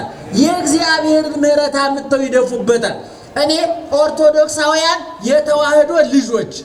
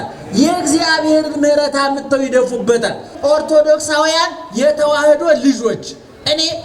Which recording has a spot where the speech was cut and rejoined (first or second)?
second